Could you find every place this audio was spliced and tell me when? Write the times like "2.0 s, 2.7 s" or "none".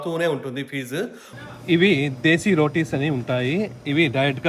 1.2 s